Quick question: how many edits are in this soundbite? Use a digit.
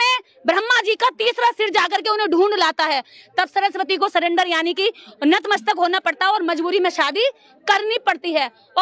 0